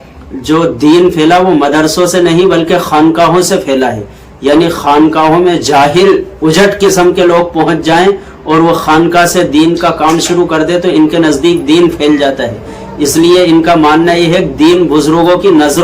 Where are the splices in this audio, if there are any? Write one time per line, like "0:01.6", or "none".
none